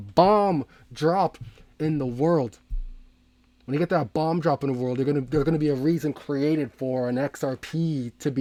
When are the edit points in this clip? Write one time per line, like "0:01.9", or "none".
none